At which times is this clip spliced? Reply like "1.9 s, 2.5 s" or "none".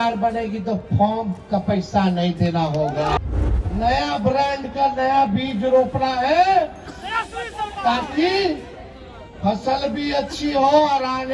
3.2 s